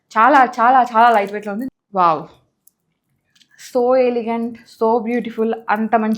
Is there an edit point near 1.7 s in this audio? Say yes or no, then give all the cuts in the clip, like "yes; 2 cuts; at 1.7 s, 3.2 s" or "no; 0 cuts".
yes; 1 cut; at 1.7 s